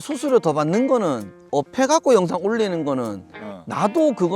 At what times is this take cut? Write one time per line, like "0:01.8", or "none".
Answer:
0:01.3